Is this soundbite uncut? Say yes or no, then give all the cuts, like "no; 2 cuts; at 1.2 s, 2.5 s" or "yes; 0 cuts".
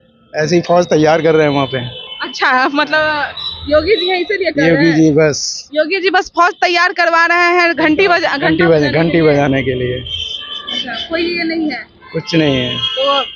yes; 0 cuts